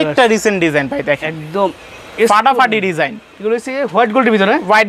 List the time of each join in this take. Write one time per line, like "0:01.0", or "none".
none

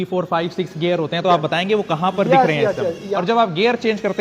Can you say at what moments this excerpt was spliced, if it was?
0:03.2

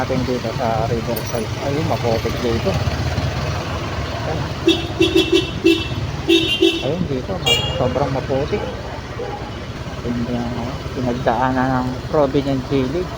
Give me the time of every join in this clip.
0:09.8

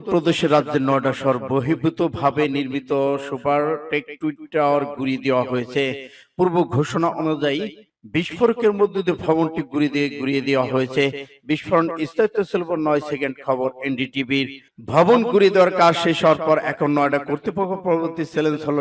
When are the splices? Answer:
none

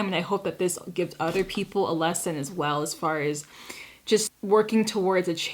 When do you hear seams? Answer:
0:04.3

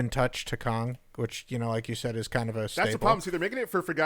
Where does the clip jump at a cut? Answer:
0:02.7

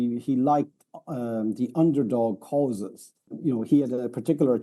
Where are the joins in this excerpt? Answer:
0:03.3

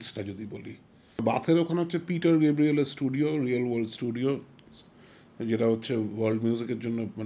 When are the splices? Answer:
0:01.2

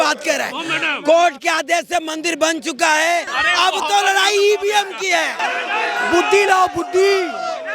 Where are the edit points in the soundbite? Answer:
0:03.4
0:05.4

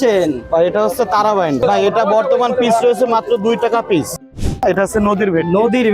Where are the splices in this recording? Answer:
0:01.6
0:04.2

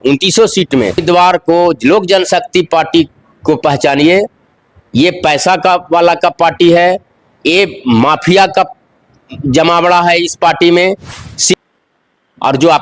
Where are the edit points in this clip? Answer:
0:01.0
0:11.5

